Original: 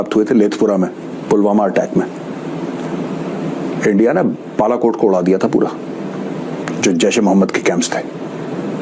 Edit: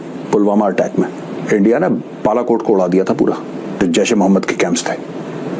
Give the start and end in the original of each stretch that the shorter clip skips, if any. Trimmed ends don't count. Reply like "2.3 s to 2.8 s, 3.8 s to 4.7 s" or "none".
2.3 s to 3.7 s, 6.1 s to 6.8 s